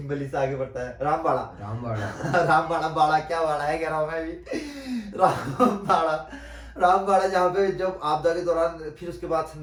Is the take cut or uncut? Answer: uncut